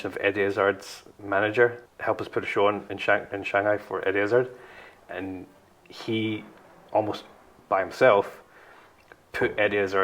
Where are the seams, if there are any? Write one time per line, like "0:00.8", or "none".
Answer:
0:01.9